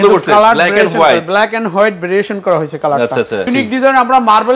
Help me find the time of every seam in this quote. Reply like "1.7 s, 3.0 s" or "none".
3.5 s